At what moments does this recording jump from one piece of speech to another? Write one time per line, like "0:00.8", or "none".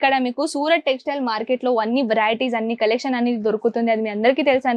none